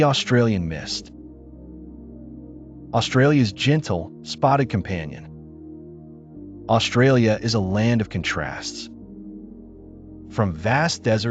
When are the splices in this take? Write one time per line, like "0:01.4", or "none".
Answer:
0:08.6
0:10.3